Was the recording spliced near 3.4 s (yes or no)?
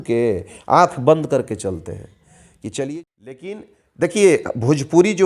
yes